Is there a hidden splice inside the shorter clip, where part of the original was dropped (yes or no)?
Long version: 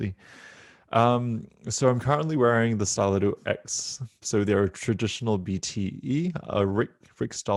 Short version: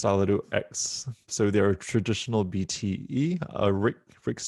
no